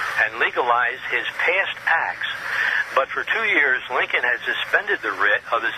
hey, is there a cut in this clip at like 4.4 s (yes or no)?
no